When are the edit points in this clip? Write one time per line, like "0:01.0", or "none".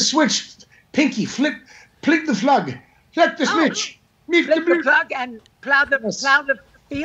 none